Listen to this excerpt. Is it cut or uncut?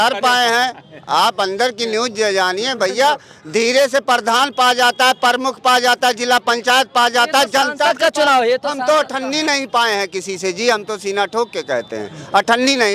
uncut